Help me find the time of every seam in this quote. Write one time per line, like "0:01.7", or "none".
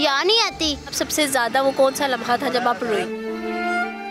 0:01.0